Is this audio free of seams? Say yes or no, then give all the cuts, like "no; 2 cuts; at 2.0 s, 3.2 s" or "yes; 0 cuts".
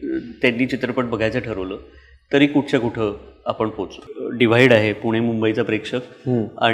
no; 1 cut; at 4.0 s